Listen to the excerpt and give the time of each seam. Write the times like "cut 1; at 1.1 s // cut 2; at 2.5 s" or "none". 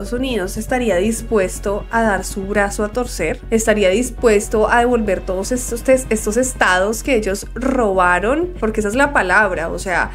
none